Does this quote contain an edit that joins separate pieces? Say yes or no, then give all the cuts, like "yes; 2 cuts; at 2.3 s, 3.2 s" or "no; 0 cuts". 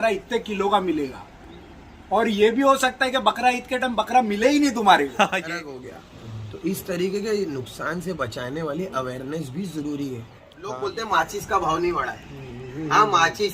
yes; 2 cuts; at 5.5 s, 10.6 s